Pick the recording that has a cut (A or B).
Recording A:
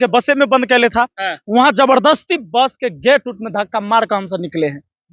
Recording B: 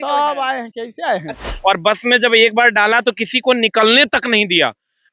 B